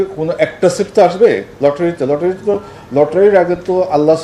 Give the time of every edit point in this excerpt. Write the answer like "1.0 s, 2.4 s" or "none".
none